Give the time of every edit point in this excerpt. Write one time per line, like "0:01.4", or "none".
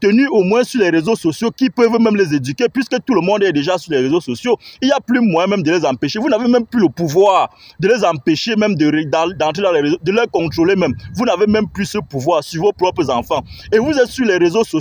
none